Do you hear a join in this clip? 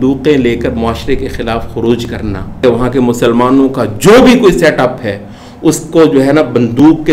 yes; 1 cut; at 2.6 s

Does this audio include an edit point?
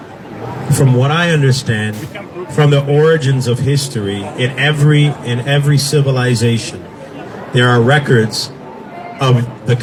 no; 0 cuts

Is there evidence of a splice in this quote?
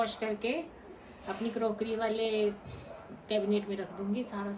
no; 0 cuts

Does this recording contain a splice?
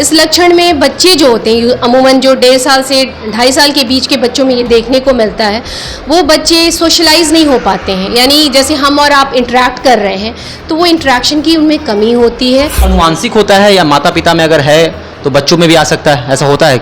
yes; 1 cut; at 12.8 s

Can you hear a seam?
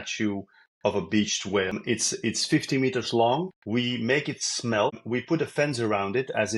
yes; 3 cuts; at 1.8 s, 3.6 s, 5.0 s

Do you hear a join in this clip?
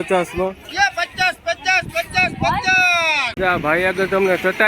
yes; 1 cut; at 3.4 s

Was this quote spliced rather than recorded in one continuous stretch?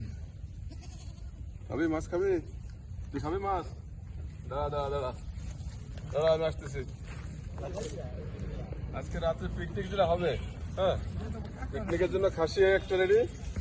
yes; 1 cut; at 7.6 s

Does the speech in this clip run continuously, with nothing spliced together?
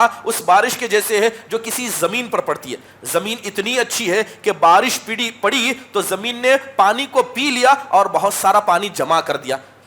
yes; 0 cuts

